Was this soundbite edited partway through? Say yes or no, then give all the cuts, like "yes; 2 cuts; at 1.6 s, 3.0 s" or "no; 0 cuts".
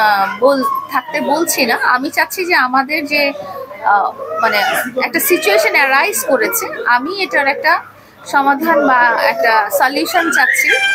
no; 0 cuts